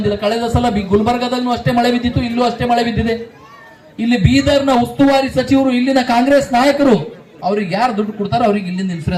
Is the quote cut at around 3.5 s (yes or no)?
no